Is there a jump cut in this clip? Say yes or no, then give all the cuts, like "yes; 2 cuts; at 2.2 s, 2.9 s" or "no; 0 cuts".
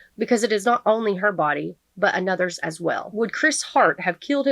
yes; 1 cut; at 3.1 s